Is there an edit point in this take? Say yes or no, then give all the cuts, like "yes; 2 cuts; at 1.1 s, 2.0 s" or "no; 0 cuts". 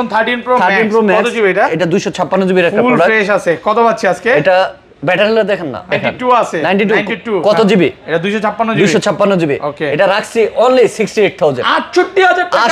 yes; 1 cut; at 5.9 s